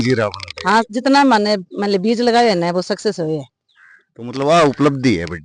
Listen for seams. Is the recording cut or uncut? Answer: uncut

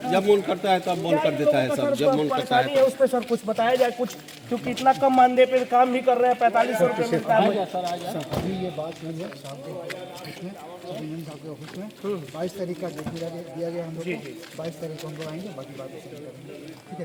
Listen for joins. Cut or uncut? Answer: uncut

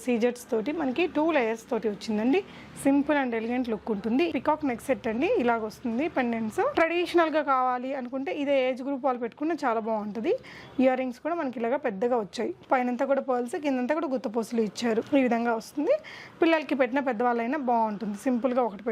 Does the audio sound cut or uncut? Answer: cut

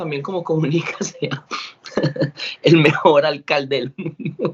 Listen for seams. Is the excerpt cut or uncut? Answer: uncut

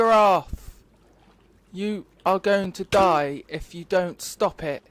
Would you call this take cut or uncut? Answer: uncut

